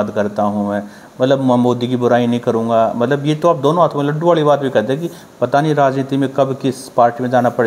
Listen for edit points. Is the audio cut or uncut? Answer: uncut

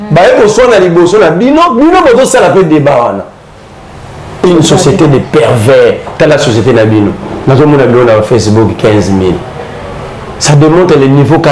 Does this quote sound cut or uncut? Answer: cut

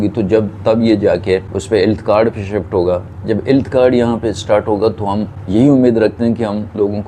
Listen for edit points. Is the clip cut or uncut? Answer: cut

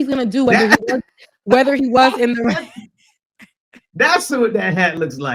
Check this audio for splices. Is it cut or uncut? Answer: uncut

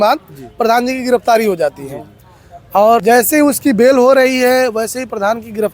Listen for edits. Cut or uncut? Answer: cut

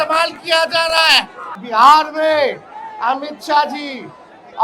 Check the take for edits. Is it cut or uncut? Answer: cut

